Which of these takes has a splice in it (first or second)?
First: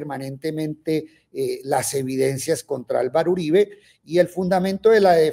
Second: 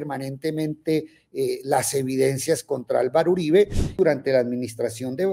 second